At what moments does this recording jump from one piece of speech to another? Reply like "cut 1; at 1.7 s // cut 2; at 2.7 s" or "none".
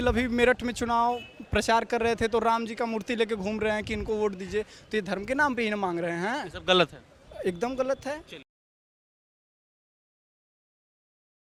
none